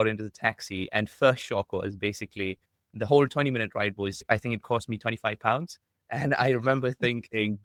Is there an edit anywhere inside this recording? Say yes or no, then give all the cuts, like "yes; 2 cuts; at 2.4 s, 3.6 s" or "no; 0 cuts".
no; 0 cuts